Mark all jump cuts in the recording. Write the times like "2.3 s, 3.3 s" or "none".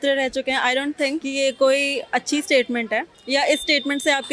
1.2 s, 3.2 s